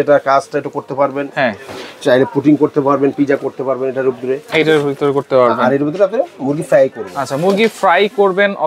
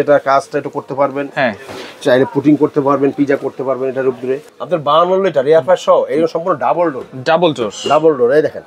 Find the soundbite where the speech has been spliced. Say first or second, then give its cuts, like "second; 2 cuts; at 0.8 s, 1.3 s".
second; 1 cut; at 4.5 s